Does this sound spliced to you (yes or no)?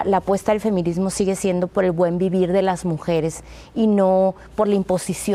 no